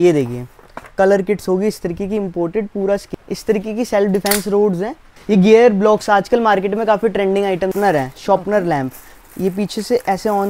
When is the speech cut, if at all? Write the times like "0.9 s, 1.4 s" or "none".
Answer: 3.1 s, 5.1 s, 7.7 s